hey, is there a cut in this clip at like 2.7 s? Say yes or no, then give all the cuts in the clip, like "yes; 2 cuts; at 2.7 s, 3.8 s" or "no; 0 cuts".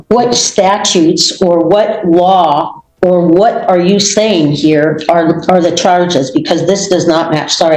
no; 0 cuts